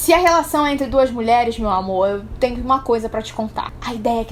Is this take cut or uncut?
uncut